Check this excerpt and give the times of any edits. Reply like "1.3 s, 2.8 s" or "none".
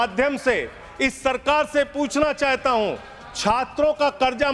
none

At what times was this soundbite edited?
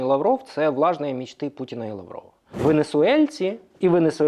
2.4 s

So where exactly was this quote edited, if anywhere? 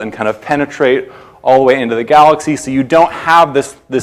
none

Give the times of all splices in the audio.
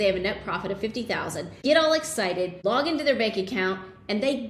1.5 s, 2.5 s

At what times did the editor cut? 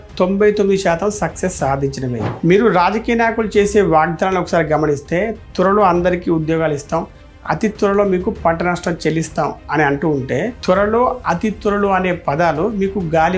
2.3 s

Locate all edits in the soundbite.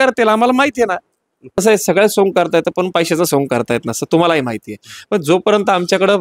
1.6 s

